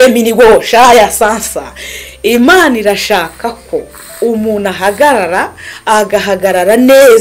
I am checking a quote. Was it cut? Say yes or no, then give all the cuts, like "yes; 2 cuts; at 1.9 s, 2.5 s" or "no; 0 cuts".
no; 0 cuts